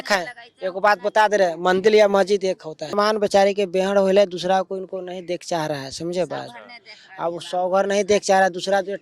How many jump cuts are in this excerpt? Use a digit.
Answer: 1